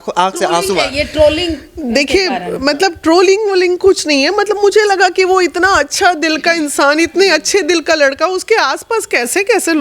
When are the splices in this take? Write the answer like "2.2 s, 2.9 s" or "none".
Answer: none